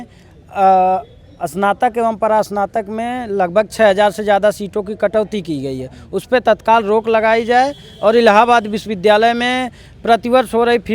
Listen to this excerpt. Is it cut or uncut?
uncut